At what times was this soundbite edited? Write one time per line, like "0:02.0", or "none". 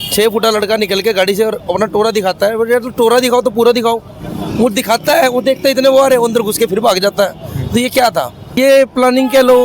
0:08.5